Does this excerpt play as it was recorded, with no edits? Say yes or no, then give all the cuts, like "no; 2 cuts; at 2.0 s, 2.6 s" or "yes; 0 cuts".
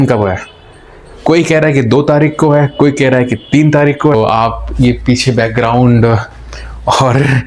no; 1 cut; at 4.1 s